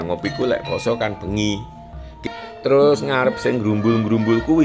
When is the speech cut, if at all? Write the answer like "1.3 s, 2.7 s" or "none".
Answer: 2.2 s